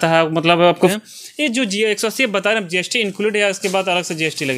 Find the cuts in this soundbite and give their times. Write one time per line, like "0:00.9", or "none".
0:00.9